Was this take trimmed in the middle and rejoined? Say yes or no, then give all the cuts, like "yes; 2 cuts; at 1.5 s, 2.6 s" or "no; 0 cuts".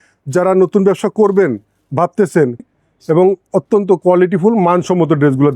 yes; 1 cut; at 2.6 s